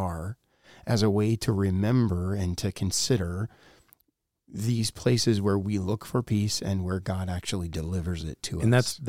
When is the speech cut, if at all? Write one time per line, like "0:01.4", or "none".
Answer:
none